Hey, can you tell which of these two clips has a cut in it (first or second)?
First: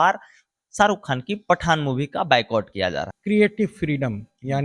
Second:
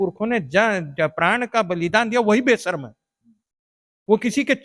first